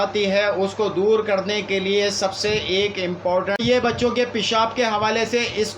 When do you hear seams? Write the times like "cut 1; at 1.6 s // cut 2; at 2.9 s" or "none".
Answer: cut 1; at 3.6 s

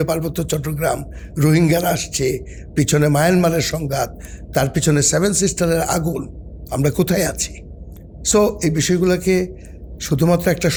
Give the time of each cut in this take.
none

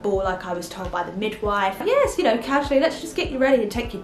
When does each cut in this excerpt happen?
cut 1; at 1.8 s

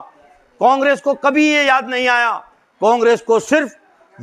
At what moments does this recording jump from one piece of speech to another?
none

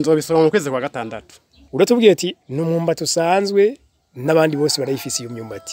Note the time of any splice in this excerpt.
cut 1; at 1.6 s

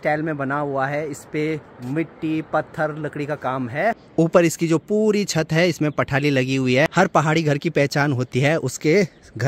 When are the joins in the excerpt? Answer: none

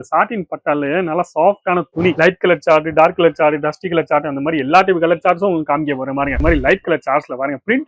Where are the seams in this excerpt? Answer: cut 1; at 2.2 s // cut 2; at 6.4 s

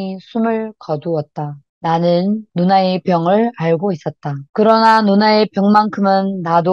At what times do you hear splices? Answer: cut 1; at 4.3 s

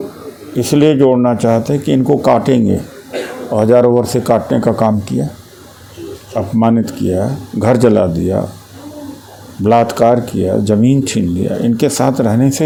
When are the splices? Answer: none

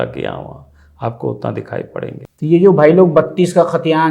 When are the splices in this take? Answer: cut 1; at 2.1 s

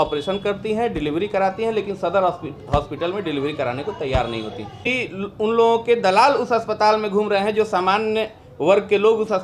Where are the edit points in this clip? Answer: cut 1; at 4.9 s

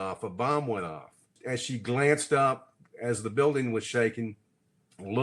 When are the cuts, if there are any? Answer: cut 1; at 1.3 s

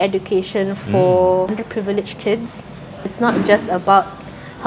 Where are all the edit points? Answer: cut 1; at 1.6 s // cut 2; at 3.1 s

